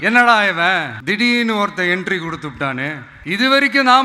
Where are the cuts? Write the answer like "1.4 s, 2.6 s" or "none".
0.9 s, 3.1 s

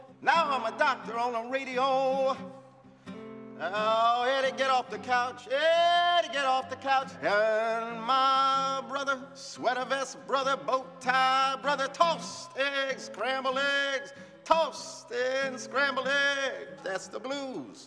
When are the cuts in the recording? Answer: 6.4 s

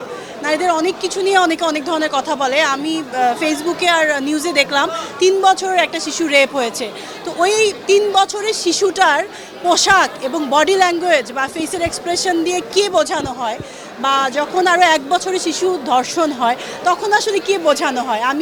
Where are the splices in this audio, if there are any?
none

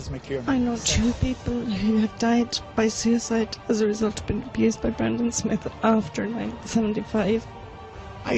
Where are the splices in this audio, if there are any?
4.9 s

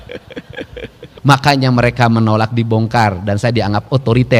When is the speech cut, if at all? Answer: 1.0 s

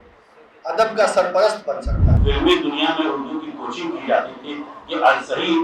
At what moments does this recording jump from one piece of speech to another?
2.1 s

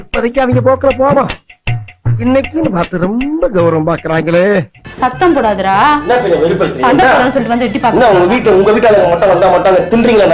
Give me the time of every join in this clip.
4.8 s

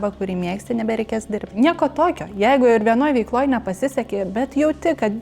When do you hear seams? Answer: 1.5 s

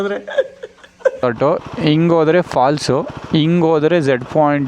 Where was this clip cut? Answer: 1.2 s

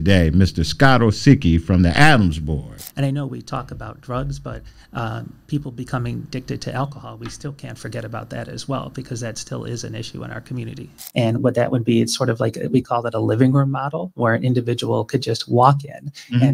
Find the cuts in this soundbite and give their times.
2.8 s, 11.0 s

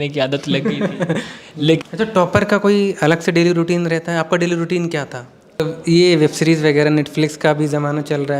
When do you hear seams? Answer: 1.8 s, 5.6 s

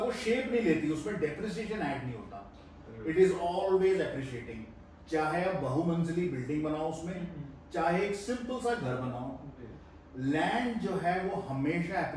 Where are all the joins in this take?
none

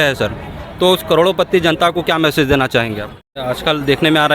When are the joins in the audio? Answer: 3.4 s

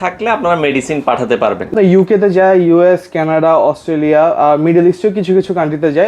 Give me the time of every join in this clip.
1.7 s

